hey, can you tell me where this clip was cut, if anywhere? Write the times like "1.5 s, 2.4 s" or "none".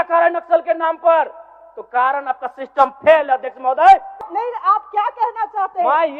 4.3 s